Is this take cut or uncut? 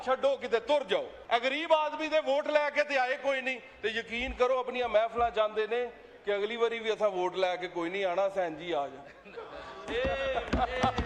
cut